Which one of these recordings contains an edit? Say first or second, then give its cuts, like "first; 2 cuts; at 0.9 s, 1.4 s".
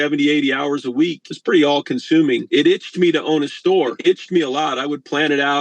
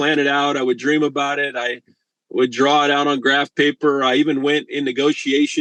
first; 3 cuts; at 1.3 s, 2.4 s, 4.0 s